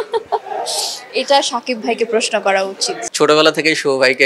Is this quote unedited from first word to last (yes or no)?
no